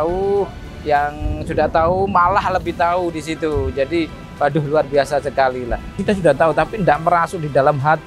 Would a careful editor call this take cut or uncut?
cut